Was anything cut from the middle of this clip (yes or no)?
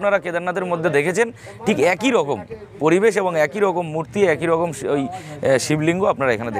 no